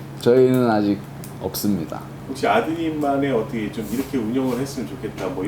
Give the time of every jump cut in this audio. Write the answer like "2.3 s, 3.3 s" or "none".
2.2 s